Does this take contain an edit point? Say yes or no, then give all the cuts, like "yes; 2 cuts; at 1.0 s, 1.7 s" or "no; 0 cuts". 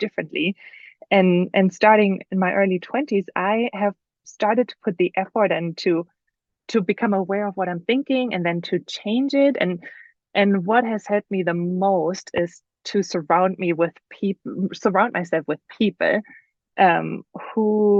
no; 0 cuts